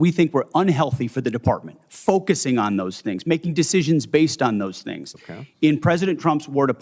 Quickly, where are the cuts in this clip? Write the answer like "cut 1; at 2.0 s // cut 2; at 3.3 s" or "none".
none